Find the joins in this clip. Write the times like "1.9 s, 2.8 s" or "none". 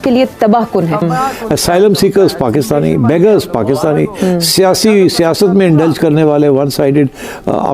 1.0 s